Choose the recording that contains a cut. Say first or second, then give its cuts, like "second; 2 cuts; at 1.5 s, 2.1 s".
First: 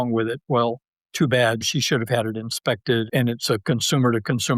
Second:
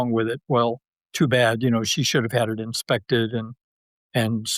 first; 2 cuts; at 1.6 s, 3.1 s